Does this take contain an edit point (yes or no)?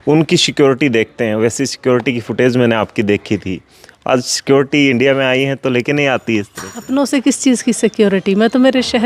no